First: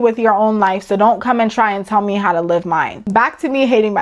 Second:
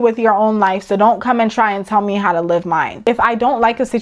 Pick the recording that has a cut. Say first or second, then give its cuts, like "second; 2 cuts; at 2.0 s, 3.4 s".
second; 1 cut; at 2.9 s